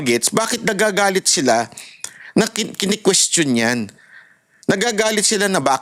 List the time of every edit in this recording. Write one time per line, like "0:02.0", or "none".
none